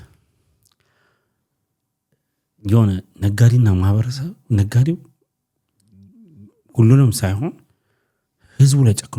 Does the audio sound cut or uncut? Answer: uncut